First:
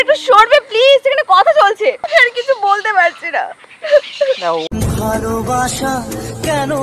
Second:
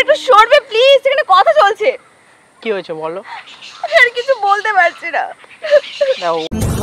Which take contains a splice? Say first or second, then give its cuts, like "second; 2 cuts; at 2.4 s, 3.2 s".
first; 1 cut; at 2.0 s